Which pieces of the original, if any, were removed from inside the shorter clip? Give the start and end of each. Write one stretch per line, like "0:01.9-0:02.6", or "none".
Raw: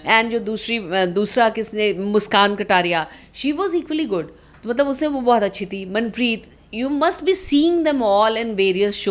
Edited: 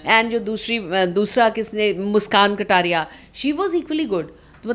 none